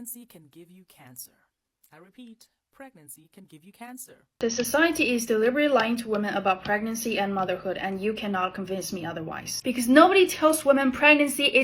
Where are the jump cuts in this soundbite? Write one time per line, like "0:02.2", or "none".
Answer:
0:04.3

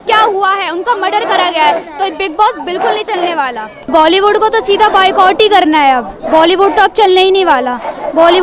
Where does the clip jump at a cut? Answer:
0:03.8

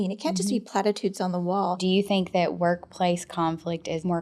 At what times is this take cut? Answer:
0:01.8

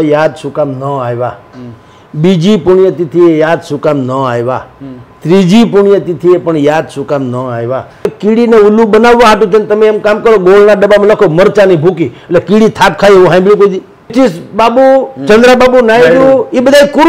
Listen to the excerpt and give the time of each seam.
0:08.1
0:14.1

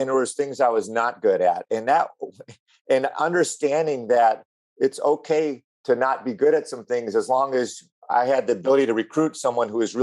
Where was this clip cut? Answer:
0:05.7

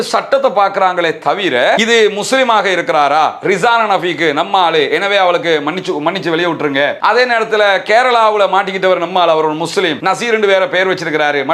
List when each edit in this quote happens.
0:01.8

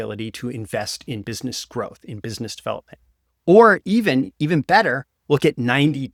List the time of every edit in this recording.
none

